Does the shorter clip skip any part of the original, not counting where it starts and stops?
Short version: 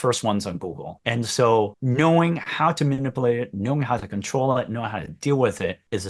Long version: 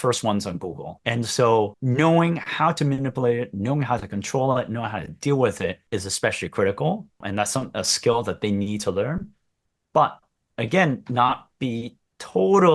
no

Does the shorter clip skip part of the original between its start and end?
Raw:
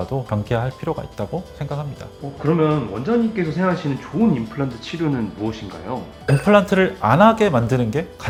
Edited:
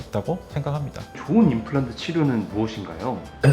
yes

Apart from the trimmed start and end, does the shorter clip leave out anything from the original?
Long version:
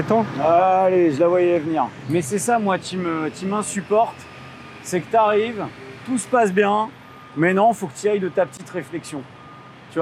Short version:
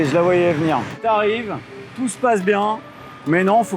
yes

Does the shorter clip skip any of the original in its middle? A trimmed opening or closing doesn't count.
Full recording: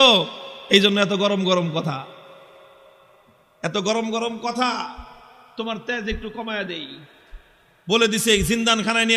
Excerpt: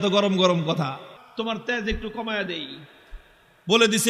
yes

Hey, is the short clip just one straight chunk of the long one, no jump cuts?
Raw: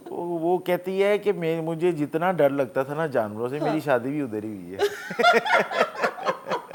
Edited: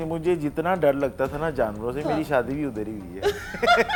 yes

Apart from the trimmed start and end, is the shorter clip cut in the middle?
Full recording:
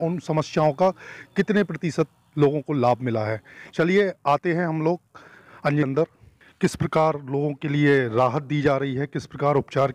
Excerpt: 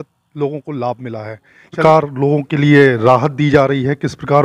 yes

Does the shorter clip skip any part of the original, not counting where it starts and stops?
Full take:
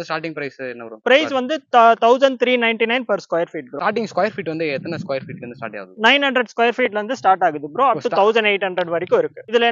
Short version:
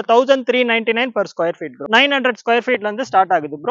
yes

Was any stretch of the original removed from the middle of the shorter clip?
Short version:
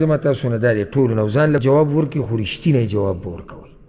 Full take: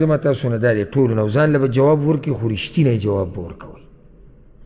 yes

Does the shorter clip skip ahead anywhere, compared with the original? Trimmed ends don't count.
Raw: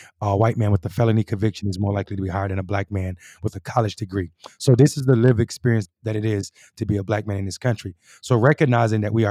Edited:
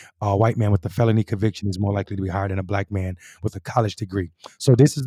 no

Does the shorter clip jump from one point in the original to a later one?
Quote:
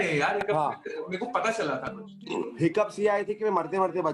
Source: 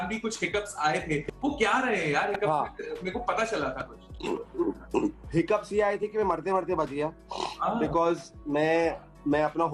yes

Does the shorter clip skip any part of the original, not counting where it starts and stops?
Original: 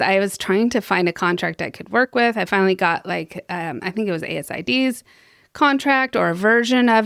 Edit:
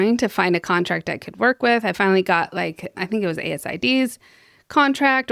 yes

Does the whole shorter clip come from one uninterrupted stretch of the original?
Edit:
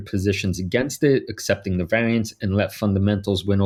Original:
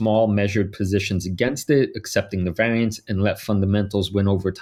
yes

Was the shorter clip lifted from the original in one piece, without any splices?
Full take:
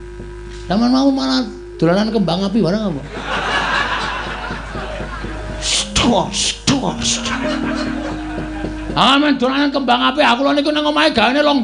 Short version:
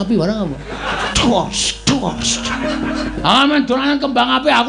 no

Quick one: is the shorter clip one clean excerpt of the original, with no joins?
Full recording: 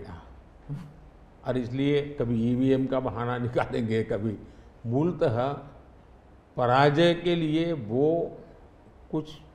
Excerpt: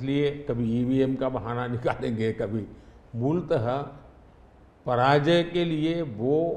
yes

